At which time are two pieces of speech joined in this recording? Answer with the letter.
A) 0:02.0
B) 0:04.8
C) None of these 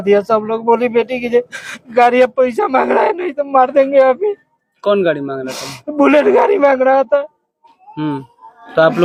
C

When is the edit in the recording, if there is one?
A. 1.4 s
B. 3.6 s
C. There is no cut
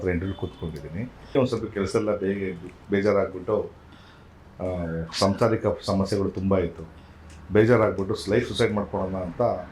A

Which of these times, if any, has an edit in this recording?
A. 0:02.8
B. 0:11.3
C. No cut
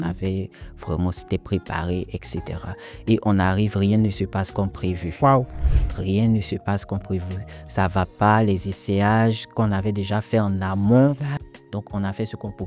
B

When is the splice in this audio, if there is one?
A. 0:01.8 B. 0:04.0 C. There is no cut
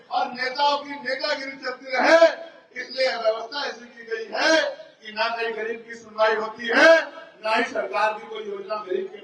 C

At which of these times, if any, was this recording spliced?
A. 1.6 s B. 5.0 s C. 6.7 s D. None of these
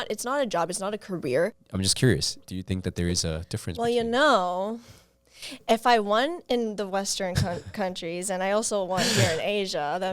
A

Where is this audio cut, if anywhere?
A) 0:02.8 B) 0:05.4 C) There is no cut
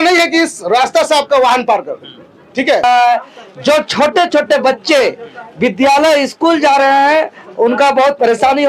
A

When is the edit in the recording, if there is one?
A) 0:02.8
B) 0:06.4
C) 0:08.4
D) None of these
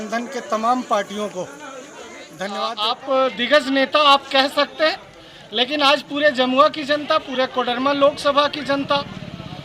A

